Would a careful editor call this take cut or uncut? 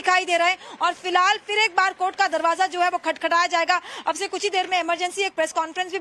uncut